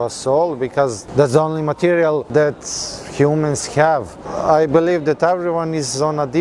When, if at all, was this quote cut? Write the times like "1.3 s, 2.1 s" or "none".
1.0 s, 2.3 s, 4.3 s